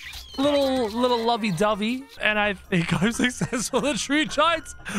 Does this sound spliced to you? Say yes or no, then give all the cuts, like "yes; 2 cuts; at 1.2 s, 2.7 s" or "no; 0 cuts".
yes; 1 cut; at 2.2 s